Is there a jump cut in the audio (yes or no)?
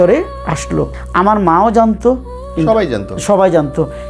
yes